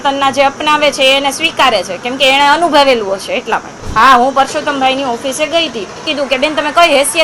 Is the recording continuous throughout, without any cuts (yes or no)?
no